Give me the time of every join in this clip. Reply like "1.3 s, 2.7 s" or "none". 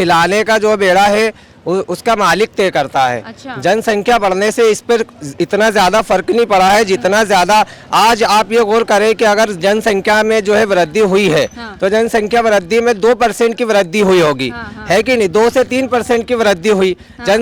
none